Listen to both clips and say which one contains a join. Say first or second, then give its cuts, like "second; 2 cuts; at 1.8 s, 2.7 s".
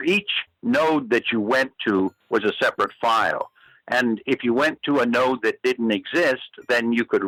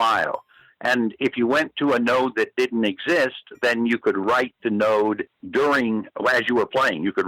second; 1 cut; at 5.3 s